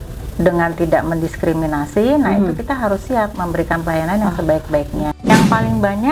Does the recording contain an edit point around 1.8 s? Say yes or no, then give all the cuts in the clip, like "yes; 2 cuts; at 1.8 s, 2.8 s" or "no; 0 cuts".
no; 1 cut; at 5.1 s